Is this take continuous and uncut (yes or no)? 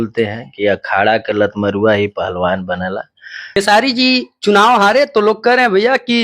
no